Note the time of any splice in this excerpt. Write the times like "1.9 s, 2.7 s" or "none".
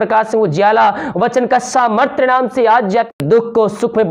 3.1 s